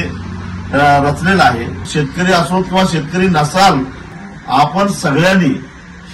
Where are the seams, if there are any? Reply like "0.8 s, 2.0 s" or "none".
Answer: 1.9 s, 4.0 s